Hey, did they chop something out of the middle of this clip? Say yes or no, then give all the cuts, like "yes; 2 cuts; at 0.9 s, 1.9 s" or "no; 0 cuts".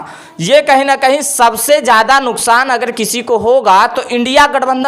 no; 0 cuts